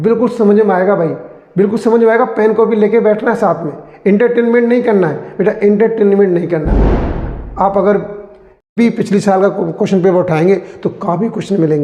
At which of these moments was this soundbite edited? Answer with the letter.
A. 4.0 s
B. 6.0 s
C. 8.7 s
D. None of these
C